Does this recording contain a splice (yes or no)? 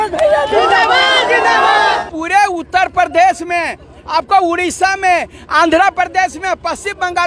yes